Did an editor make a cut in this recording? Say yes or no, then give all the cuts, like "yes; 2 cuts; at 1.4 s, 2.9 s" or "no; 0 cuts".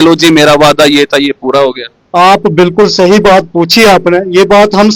no; 0 cuts